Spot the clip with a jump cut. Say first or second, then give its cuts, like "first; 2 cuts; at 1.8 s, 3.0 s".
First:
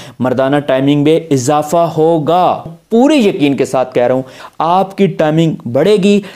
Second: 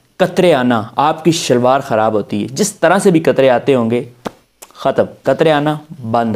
first; 2 cuts; at 2.8 s, 4.4 s